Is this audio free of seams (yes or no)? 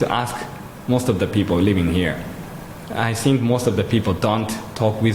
yes